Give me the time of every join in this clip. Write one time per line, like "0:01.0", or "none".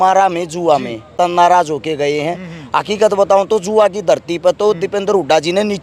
0:01.1

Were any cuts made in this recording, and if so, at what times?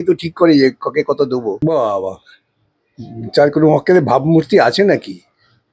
0:01.5

